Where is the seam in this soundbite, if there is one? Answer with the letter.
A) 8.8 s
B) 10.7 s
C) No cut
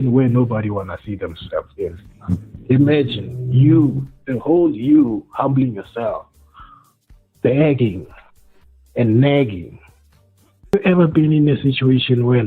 B